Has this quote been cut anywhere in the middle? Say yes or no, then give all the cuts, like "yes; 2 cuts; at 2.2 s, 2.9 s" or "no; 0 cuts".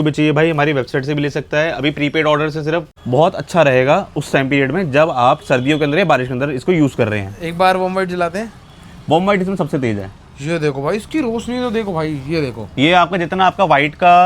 yes; 1 cut; at 2.9 s